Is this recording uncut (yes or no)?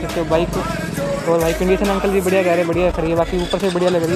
yes